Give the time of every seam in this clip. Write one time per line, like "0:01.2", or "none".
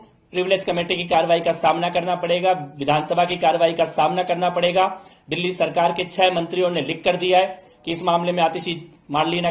none